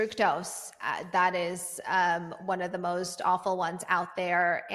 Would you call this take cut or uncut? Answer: uncut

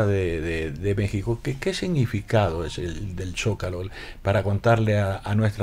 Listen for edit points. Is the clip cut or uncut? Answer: uncut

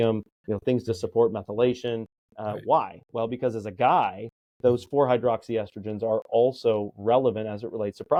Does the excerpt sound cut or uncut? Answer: uncut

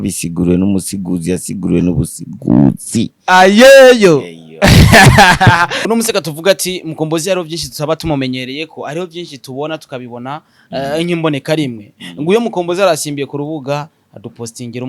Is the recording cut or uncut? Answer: cut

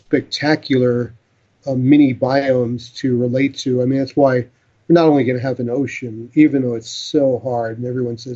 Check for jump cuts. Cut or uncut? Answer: uncut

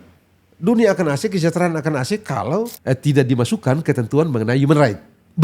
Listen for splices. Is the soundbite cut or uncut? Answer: cut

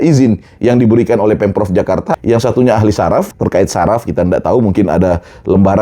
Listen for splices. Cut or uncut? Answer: cut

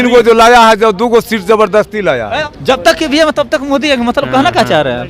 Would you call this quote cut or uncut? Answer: cut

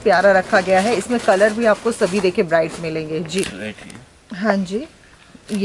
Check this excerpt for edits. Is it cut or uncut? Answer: cut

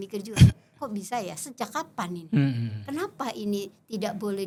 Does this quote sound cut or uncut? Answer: uncut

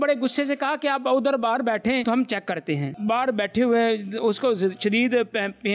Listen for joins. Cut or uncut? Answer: uncut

